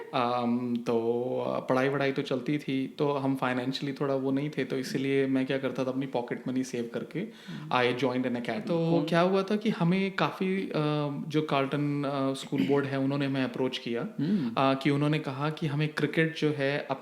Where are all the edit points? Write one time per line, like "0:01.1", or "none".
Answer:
0:08.7